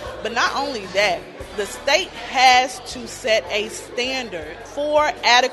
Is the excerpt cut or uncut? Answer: cut